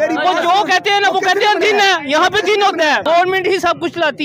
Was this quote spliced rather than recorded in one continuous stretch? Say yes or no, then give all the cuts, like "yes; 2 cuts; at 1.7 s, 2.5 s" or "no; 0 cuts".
yes; 1 cut; at 3.0 s